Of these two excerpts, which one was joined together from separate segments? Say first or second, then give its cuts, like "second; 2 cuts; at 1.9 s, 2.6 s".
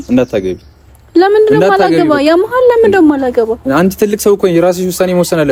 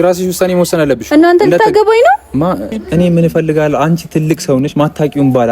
second; 1 cut; at 2.8 s